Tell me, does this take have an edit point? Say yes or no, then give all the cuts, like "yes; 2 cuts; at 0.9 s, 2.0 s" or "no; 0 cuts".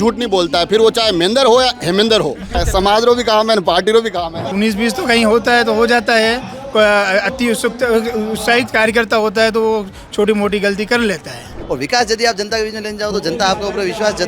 yes; 3 cuts; at 2.6 s, 4.5 s, 11.5 s